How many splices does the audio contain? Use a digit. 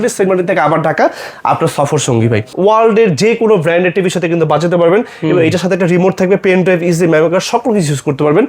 1